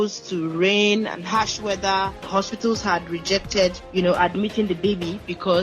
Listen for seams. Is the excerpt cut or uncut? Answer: cut